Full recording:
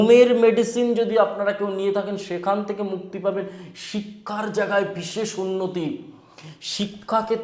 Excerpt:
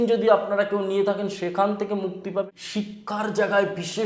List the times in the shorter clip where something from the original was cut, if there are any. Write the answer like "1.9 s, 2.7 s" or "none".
2.6 s